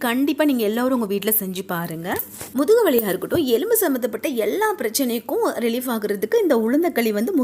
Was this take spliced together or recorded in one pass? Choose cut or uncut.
uncut